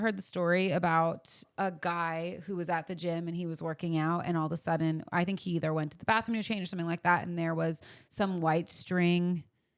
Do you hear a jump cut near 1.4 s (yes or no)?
yes